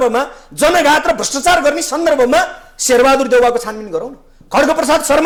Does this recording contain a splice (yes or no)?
no